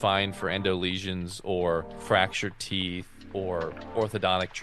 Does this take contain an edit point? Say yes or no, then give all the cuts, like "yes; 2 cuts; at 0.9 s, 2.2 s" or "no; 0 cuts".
yes; 2 cuts; at 1.9 s, 3.4 s